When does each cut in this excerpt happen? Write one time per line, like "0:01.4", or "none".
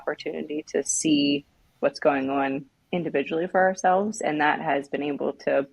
0:01.8